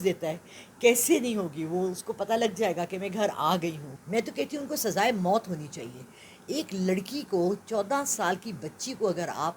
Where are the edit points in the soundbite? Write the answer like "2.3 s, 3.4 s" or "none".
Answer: 3.9 s

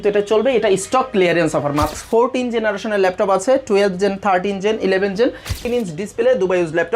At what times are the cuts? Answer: 1.9 s, 5.6 s

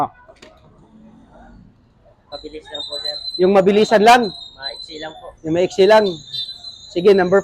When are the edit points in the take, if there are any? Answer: 2.2 s

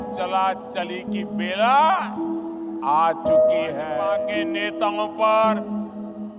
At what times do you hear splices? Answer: none

